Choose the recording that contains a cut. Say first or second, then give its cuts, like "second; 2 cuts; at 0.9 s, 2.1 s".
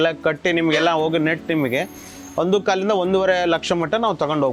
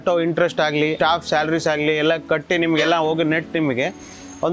second; 1 cut; at 0.9 s